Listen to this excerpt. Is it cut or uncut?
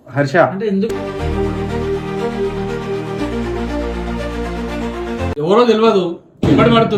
uncut